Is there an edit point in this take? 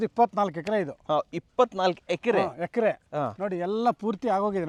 no; 0 cuts

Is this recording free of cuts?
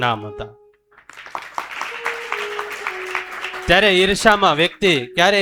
yes; 0 cuts

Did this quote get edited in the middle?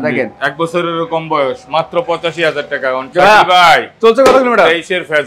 yes; 1 cut; at 3.0 s

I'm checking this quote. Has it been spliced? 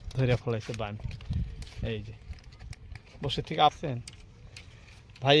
yes; 1 cut; at 3.8 s

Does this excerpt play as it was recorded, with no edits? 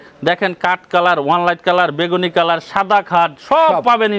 yes; 0 cuts

